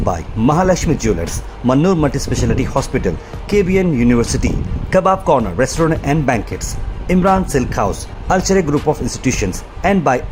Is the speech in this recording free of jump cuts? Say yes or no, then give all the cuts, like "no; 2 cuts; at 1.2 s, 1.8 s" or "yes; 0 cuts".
yes; 0 cuts